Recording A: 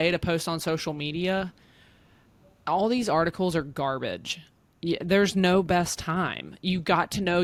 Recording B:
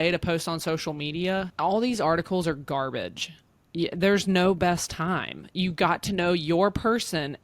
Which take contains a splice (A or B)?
B